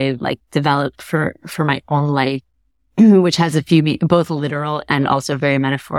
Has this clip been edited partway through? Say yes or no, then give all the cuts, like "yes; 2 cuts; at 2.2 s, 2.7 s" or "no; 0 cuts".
no; 0 cuts